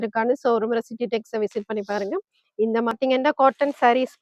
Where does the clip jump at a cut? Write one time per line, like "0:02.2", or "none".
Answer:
0:03.0